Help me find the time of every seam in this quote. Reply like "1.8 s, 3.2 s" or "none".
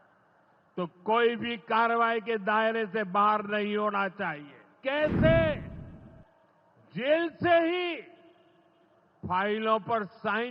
4.6 s